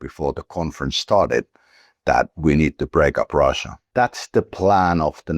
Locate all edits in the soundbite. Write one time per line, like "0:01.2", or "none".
0:03.7